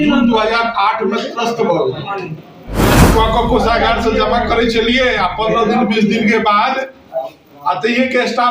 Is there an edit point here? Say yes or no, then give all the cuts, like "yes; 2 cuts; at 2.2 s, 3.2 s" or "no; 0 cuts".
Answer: yes; 1 cut; at 2.9 s